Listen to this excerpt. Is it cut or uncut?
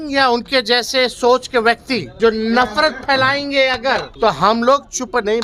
cut